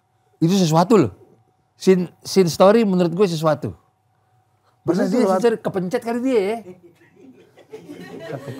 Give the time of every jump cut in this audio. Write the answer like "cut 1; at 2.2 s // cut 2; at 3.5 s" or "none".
none